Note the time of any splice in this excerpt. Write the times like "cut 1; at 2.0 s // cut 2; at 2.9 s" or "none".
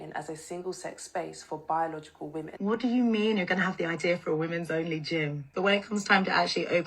cut 1; at 2.6 s // cut 2; at 5.5 s